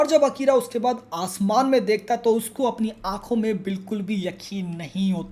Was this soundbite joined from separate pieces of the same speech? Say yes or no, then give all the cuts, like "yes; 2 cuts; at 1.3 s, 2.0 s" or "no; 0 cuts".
no; 0 cuts